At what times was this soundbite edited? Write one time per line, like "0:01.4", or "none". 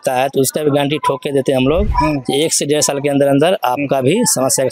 none